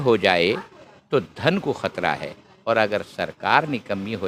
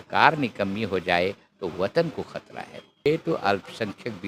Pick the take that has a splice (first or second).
second